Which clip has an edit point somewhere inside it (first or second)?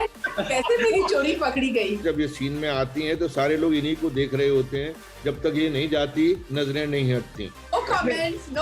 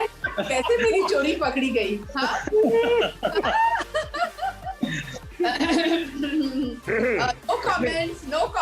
first